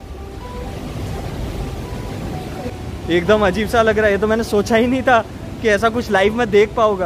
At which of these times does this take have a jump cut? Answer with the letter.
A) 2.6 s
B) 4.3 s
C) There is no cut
A